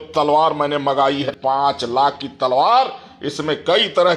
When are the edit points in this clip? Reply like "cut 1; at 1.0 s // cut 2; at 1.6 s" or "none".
cut 1; at 1.3 s